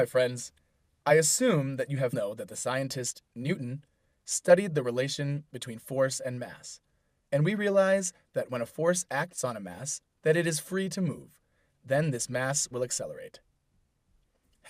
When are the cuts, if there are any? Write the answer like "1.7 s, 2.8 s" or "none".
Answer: none